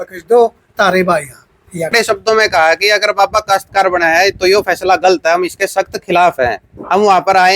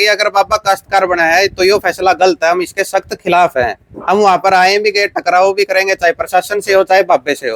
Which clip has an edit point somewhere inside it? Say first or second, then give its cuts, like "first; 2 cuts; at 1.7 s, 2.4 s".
first; 1 cut; at 1.9 s